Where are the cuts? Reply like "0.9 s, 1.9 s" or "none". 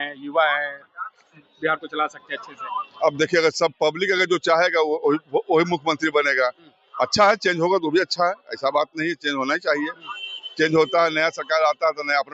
none